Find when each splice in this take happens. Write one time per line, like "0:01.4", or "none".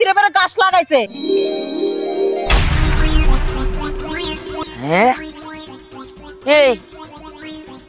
0:01.1
0:04.6